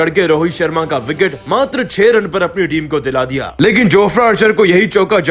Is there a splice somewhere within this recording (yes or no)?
yes